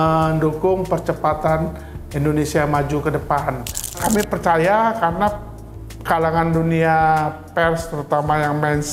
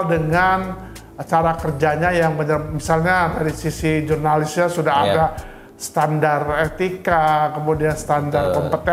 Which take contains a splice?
first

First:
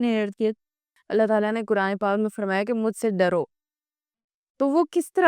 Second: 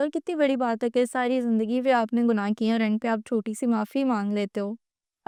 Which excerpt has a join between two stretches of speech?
first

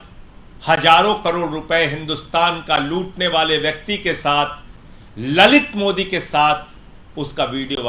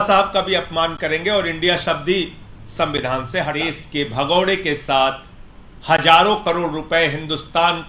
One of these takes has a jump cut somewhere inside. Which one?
second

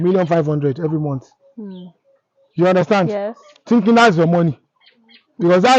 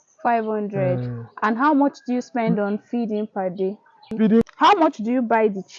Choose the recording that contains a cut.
second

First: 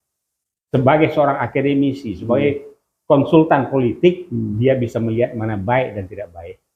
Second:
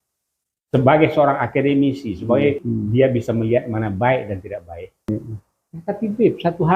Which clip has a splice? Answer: second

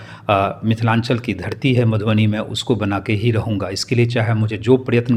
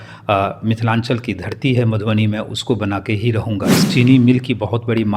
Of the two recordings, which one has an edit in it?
second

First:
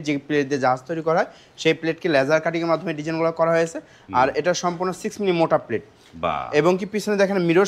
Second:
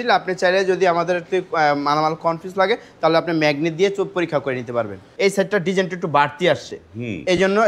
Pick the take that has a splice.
second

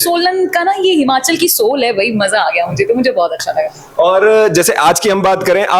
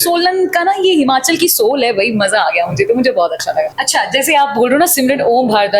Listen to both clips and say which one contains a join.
second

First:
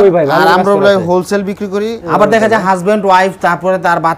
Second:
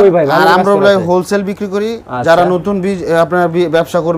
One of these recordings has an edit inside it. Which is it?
first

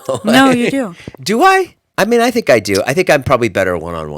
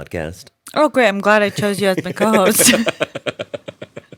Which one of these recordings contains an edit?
first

